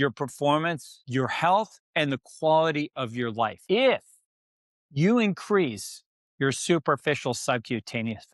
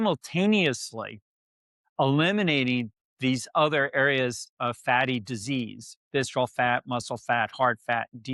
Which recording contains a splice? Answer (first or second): first